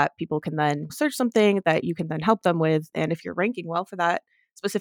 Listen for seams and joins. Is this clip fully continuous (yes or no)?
yes